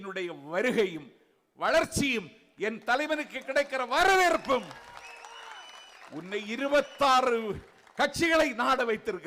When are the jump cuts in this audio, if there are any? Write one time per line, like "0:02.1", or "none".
none